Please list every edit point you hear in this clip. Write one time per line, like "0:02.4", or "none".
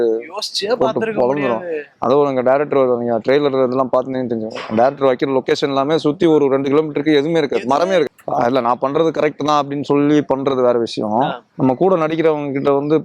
0:08.1